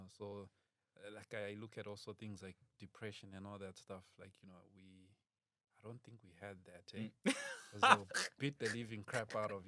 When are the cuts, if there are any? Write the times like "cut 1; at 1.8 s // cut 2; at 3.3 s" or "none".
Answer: none

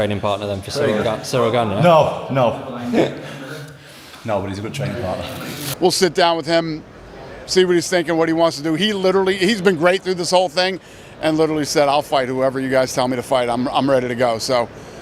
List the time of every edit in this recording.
cut 1; at 5.6 s

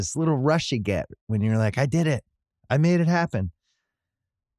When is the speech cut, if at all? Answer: none

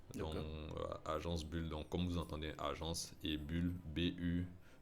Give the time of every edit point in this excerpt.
none

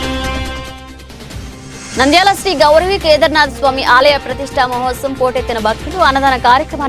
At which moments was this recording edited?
cut 1; at 1.6 s

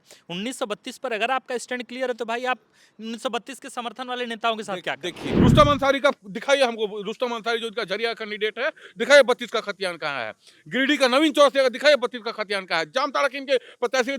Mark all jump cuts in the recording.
cut 1; at 5.2 s

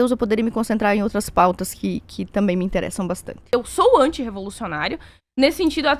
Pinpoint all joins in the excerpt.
cut 1; at 3.4 s

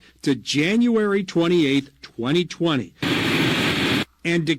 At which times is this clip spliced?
cut 1; at 3.3 s

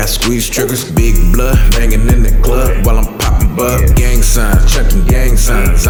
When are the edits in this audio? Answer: none

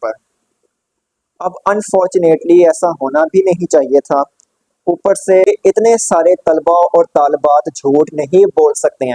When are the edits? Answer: cut 1; at 5.5 s

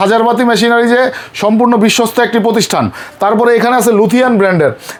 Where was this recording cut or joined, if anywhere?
none

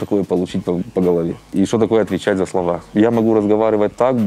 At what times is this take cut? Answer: cut 1; at 1.4 s // cut 2; at 2.9 s

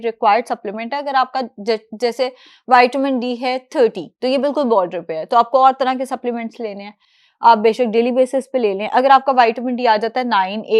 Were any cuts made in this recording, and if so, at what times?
none

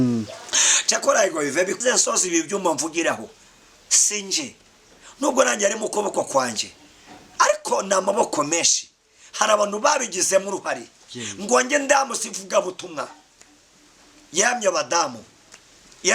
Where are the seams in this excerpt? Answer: cut 1; at 1.8 s

